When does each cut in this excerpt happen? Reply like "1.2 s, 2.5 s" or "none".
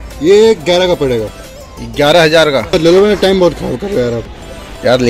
2.7 s